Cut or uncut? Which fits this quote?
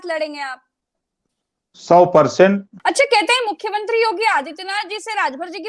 cut